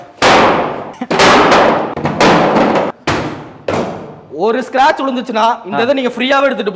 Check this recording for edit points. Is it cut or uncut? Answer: cut